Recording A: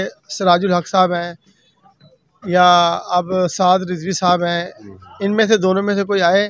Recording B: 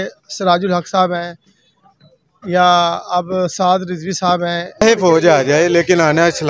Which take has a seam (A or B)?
B